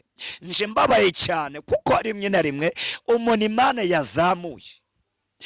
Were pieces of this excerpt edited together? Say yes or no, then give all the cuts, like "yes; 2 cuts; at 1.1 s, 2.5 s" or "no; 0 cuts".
no; 0 cuts